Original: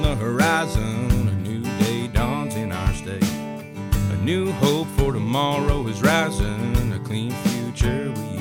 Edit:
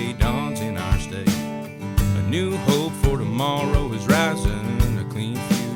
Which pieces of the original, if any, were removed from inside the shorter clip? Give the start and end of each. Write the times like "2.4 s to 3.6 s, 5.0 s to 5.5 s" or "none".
none